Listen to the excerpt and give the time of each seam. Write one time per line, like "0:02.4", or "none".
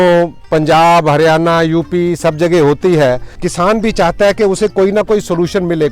0:03.3